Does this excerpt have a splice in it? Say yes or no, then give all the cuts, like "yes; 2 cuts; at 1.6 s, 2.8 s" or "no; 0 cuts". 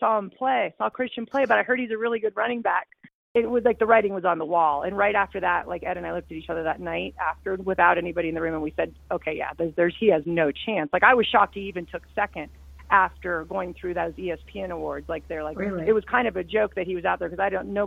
yes; 1 cut; at 3.2 s